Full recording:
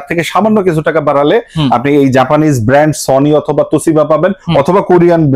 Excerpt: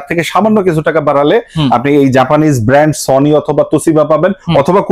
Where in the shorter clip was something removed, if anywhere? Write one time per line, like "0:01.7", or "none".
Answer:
none

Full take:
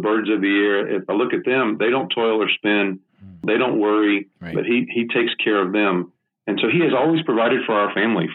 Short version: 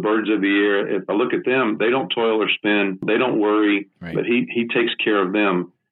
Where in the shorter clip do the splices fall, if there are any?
0:03.0

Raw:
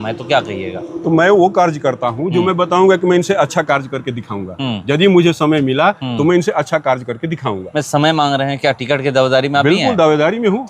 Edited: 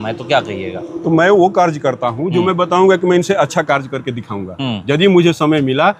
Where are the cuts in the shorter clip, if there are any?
none

